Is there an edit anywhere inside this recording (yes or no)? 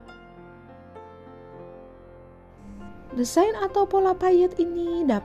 yes